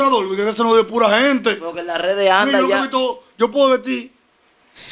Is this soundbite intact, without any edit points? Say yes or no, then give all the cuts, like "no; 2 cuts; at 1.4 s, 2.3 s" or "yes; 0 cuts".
yes; 0 cuts